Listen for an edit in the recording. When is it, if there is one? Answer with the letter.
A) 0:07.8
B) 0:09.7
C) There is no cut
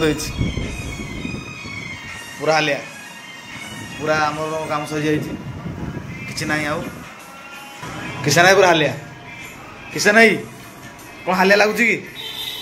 A